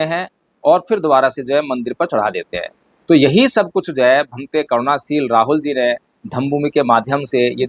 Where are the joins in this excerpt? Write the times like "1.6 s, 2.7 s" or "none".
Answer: none